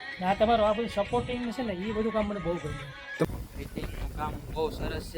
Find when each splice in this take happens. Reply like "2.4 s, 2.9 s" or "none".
3.3 s